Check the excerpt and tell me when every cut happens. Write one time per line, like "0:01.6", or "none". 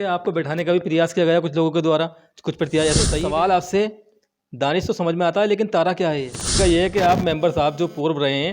0:03.2
0:06.5